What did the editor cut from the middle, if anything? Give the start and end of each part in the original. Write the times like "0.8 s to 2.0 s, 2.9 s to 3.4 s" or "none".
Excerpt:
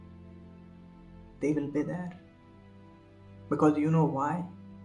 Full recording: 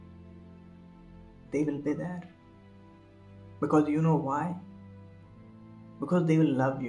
1.4 s to 1.5 s